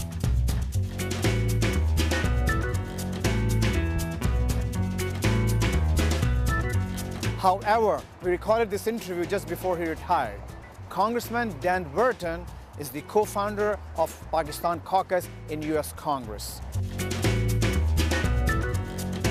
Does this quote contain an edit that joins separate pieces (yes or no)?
no